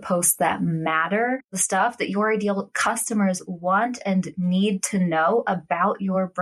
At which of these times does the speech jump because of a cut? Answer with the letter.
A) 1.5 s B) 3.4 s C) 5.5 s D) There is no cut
A